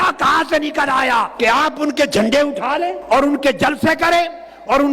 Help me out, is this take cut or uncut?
cut